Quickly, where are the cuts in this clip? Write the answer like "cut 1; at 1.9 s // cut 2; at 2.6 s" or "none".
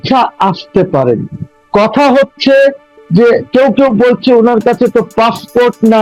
none